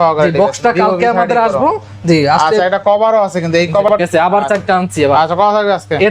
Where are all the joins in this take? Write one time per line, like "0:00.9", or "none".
0:03.9

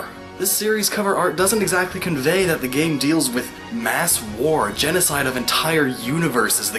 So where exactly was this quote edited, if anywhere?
0:03.3

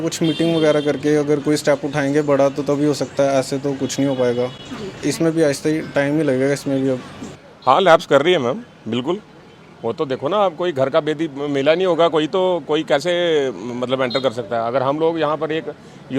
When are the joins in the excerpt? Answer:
none

